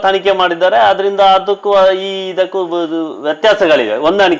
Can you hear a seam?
no; 0 cuts

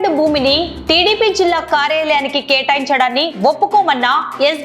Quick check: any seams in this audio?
no; 0 cuts

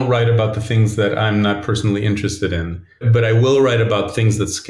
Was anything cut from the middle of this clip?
yes; 1 cut; at 3.1 s

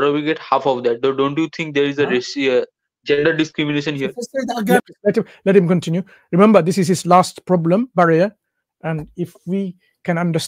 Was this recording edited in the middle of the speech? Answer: yes; 1 cut; at 4.8 s

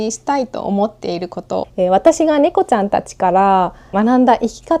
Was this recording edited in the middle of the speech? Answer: yes; 2 cuts; at 1.6 s, 3.9 s

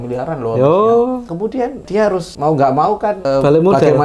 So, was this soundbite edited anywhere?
yes; 2 cuts; at 1.8 s, 3.2 s

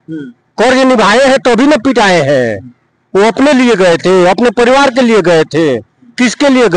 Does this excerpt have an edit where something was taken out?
no; 0 cuts

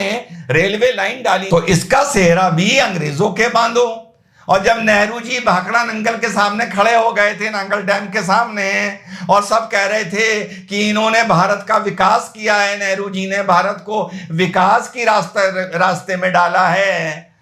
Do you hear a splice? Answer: no; 0 cuts

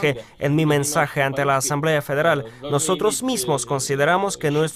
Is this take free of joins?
no; 1 cut; at 3.1 s

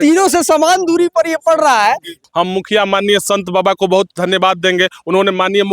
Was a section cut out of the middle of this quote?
yes; 1 cut; at 2.2 s

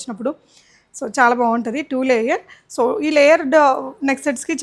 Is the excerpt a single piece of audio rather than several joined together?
yes; 0 cuts

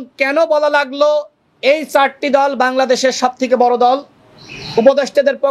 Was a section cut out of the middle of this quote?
no; 0 cuts

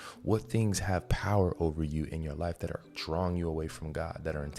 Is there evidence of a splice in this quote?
no; 0 cuts

